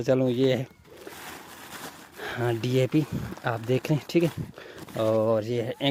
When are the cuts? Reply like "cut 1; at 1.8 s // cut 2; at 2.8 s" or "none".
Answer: none

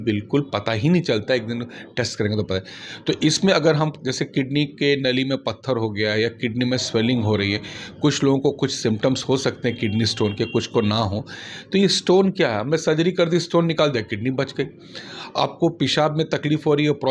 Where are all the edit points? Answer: none

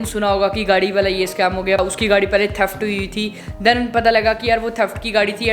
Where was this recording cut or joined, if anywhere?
cut 1; at 1.8 s // cut 2; at 3.5 s

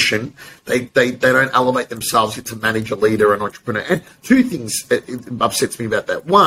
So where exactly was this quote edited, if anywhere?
none

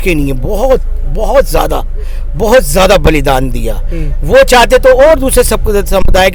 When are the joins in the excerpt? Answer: none

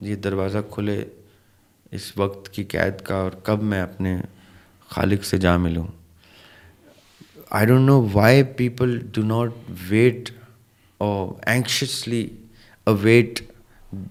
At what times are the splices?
none

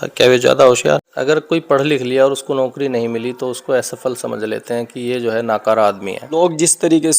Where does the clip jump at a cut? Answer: cut 1; at 1.1 s // cut 2; at 6.1 s

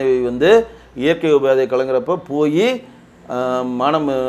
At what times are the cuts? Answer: none

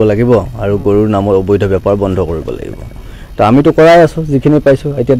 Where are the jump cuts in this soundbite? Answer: none

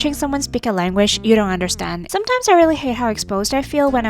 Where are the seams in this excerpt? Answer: cut 1; at 2.0 s

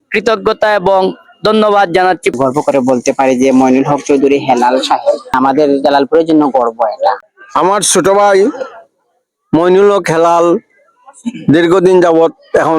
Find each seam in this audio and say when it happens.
cut 1; at 2.3 s // cut 2; at 5.4 s // cut 3; at 7.3 s

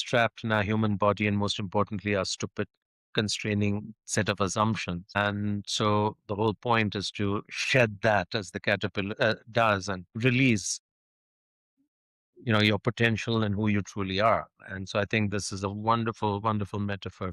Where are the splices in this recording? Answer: cut 1; at 5.2 s // cut 2; at 10.1 s

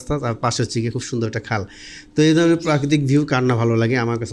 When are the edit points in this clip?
none

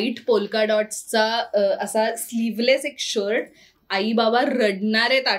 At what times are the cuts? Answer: none

